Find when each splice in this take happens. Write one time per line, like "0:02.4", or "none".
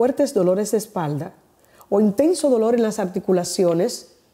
none